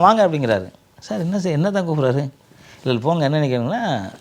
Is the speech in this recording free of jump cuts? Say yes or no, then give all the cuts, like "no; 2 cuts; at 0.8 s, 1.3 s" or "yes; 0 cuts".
yes; 0 cuts